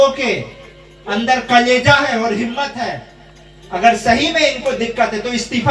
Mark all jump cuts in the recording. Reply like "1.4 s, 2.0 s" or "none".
none